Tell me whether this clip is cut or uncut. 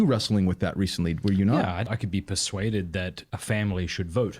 cut